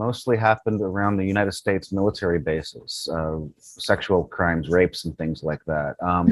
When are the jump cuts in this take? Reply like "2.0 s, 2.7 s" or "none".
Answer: none